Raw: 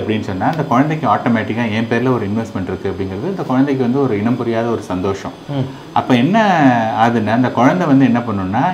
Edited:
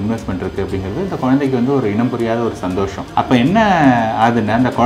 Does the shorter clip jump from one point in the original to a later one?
yes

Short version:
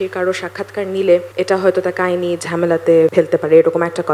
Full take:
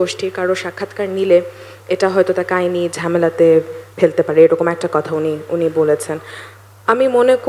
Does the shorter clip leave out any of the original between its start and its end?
yes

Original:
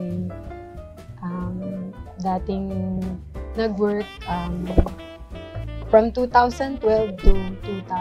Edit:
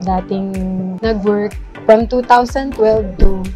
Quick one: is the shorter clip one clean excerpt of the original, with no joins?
no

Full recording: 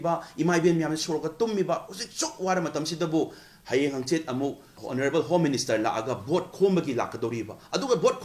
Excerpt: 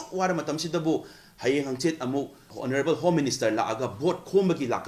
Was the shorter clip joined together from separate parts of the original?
no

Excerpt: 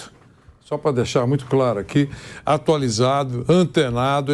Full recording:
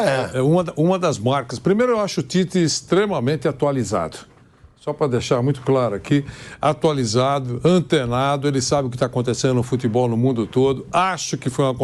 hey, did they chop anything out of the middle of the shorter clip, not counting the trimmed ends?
no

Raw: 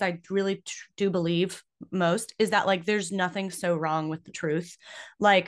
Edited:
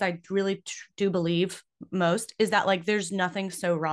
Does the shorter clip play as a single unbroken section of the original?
yes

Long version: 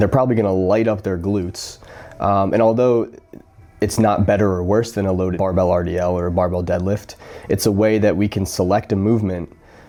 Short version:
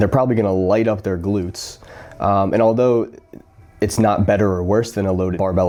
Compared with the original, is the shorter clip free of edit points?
yes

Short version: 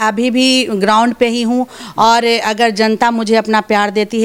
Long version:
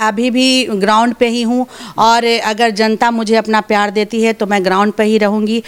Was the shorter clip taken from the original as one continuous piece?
yes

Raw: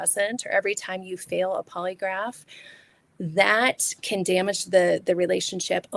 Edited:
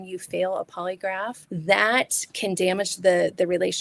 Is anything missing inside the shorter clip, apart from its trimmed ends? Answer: yes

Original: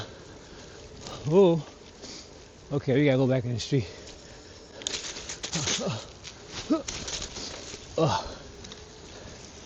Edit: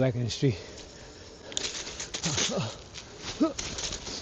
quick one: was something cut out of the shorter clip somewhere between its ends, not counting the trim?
no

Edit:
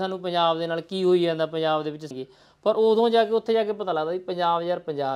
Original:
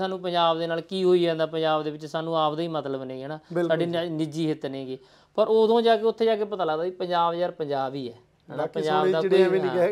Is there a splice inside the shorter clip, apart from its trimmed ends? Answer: yes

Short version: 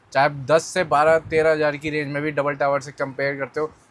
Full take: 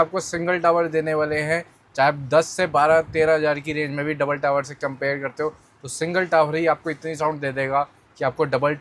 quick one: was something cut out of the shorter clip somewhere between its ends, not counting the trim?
no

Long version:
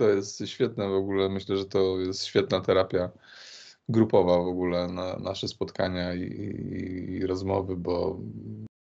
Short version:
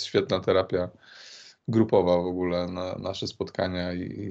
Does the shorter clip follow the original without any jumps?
yes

